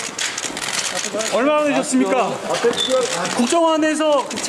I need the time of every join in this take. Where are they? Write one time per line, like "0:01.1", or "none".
none